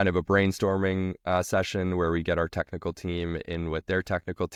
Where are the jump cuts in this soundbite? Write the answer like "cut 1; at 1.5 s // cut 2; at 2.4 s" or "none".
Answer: none